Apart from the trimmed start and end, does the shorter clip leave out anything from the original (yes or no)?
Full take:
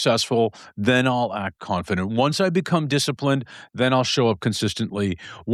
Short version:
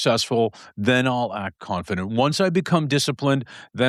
no